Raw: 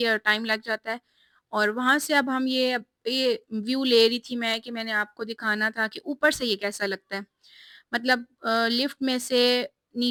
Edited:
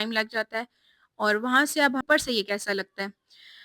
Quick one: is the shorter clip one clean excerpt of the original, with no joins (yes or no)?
no